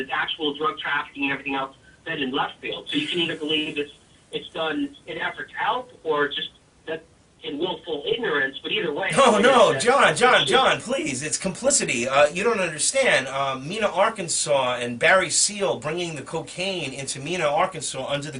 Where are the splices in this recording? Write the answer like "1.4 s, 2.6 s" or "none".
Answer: 14.4 s